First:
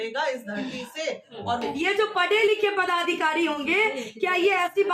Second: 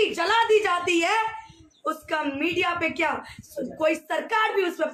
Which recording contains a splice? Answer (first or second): first